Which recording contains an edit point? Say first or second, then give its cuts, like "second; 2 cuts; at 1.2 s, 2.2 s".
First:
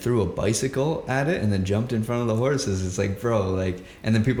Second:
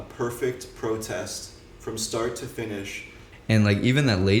second; 1 cut; at 3.3 s